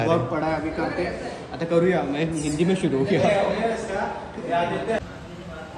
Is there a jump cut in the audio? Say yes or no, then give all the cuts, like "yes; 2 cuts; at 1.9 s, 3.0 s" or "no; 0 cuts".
no; 0 cuts